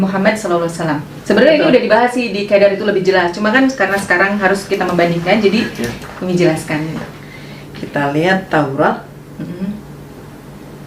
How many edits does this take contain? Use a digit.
2